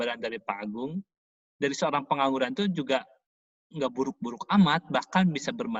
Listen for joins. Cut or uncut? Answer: uncut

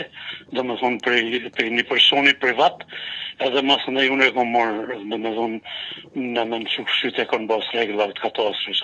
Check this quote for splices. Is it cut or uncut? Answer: uncut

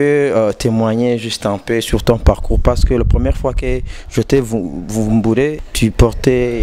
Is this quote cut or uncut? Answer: cut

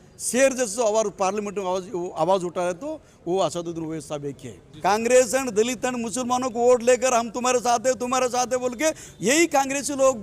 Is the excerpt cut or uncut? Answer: cut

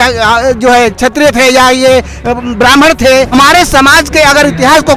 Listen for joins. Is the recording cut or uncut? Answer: cut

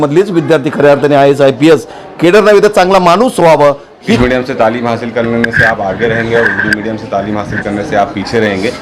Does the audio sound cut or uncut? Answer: cut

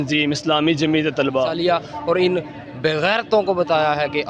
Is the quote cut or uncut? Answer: cut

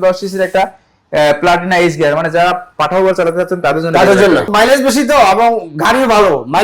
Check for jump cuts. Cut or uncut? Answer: cut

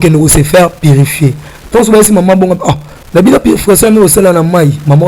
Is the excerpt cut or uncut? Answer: uncut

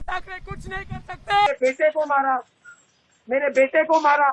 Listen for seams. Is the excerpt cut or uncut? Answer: cut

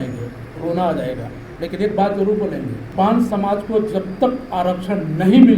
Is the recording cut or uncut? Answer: cut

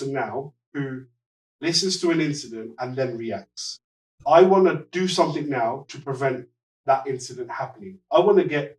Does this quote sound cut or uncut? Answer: uncut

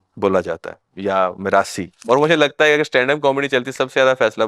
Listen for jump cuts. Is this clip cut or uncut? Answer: cut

